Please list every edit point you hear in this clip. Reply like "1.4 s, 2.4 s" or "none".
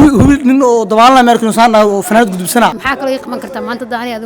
2.8 s